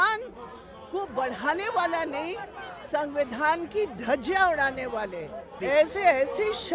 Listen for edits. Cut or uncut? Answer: cut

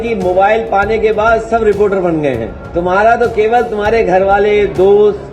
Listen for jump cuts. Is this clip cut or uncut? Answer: cut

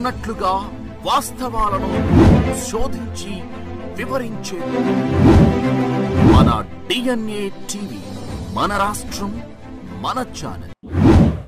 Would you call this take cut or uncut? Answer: uncut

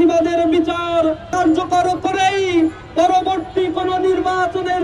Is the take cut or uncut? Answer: cut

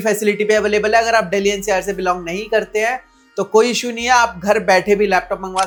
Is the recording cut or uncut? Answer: uncut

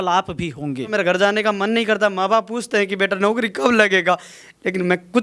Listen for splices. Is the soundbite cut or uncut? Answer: cut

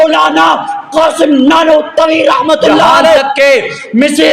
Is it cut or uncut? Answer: cut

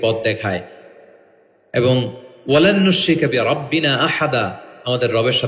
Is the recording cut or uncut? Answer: uncut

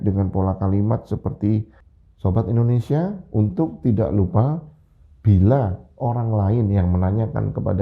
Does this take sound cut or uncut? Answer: cut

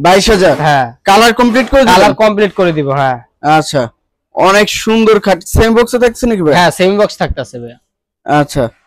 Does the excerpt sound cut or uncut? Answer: uncut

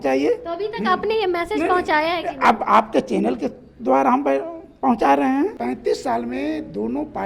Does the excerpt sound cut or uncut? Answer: cut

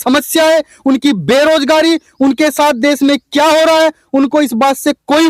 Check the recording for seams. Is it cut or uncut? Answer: uncut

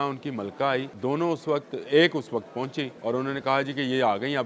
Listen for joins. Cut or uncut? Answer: cut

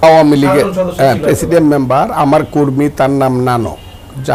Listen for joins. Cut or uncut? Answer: uncut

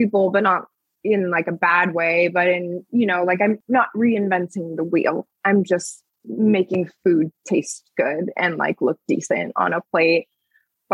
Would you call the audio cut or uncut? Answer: cut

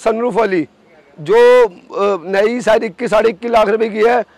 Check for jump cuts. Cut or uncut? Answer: uncut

